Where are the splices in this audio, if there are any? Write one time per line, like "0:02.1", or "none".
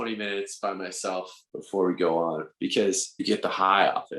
0:01.4
0:03.2